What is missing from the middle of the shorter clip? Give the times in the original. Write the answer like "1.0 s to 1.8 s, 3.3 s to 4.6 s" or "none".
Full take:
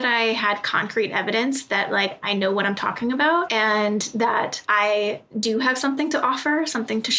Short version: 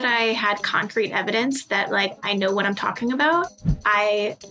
3.6 s to 4.4 s